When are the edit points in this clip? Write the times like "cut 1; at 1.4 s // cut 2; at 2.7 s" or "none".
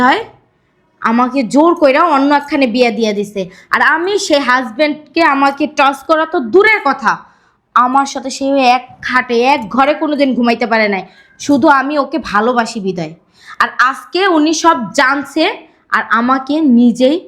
none